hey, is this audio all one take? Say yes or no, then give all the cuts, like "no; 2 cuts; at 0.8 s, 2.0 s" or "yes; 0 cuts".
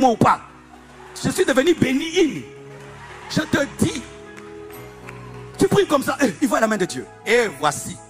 yes; 0 cuts